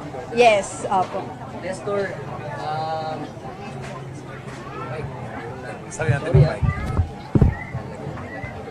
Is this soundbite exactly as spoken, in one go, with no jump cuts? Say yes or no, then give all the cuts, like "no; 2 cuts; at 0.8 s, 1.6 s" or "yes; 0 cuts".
no; 1 cut; at 5.1 s